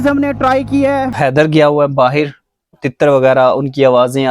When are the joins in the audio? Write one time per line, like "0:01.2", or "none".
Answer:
0:01.2
0:02.8